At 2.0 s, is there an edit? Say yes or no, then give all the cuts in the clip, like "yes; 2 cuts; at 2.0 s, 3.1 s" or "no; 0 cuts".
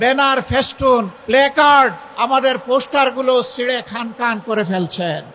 yes; 2 cuts; at 1.2 s, 2.0 s